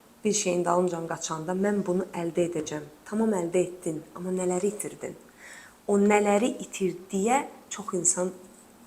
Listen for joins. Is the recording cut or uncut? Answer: uncut